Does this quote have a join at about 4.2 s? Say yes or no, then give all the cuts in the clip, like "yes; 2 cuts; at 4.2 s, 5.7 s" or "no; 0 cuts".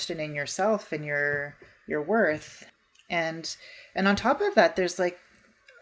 no; 1 cut; at 2.7 s